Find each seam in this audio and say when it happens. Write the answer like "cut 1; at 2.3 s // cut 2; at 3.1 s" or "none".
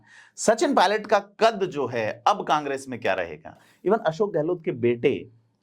cut 1; at 3.7 s